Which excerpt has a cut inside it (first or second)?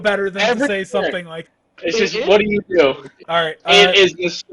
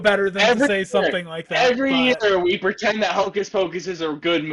first